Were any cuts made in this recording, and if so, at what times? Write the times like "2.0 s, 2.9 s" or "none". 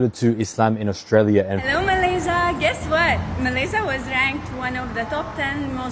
1.7 s

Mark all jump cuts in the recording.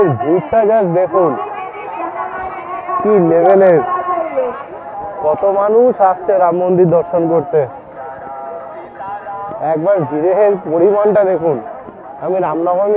none

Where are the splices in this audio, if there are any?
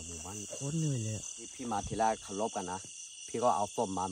1.4 s

